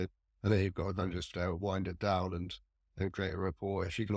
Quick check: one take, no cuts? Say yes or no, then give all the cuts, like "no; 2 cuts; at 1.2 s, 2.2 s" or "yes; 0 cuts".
yes; 0 cuts